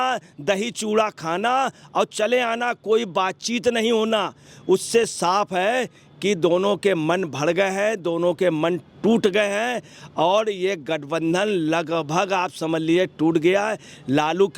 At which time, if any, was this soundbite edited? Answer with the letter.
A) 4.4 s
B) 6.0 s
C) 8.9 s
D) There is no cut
D